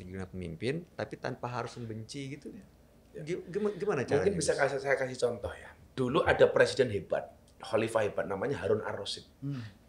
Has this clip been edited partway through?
no; 0 cuts

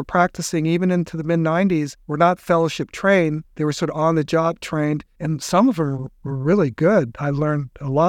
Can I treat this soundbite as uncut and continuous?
no; 2 cuts; at 2.0 s, 3.5 s

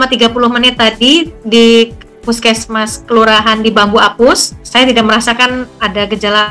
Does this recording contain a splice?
yes; 1 cut; at 4.6 s

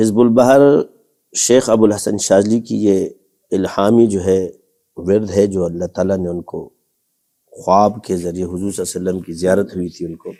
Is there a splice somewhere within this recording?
no; 0 cuts

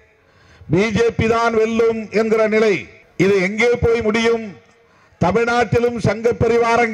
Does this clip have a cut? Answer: yes; 1 cut; at 3.0 s

